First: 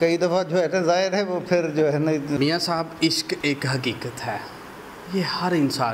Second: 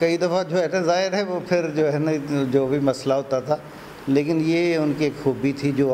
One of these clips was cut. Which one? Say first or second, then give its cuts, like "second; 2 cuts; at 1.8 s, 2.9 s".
first; 1 cut; at 2.4 s